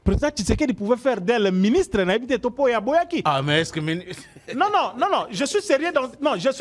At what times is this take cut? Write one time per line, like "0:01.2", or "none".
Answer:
none